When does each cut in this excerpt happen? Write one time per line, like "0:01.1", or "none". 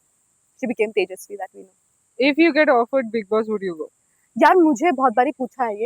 none